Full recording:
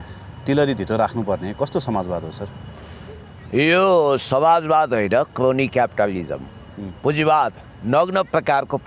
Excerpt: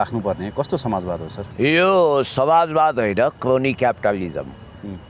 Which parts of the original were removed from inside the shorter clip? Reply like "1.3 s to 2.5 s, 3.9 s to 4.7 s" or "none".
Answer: 2.4 s to 3.3 s